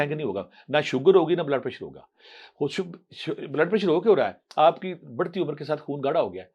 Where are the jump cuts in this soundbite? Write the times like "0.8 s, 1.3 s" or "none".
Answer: none